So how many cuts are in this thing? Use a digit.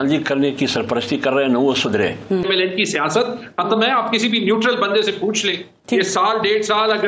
1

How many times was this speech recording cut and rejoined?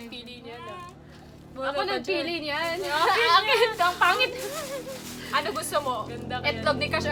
0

